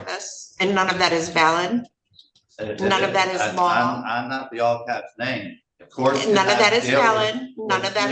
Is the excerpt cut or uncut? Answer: uncut